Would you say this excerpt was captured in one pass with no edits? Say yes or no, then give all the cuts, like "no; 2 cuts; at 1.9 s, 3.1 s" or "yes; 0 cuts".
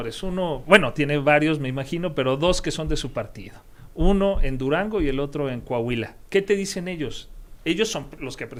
yes; 0 cuts